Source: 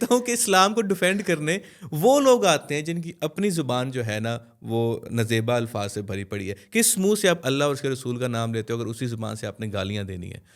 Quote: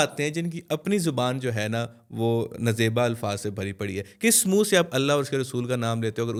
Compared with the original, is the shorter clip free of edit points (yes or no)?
yes